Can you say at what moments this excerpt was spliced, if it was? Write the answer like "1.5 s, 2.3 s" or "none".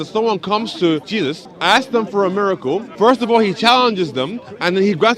1.2 s, 2.9 s